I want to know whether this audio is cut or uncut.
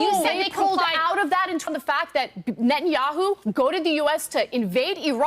cut